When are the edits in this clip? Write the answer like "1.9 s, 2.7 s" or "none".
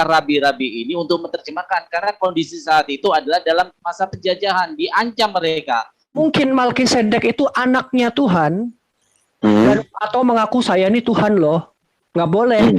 6.2 s